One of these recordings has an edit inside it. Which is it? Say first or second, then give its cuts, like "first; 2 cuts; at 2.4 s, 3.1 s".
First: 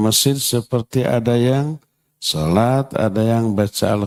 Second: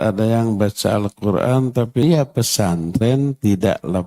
second; 1 cut; at 2.0 s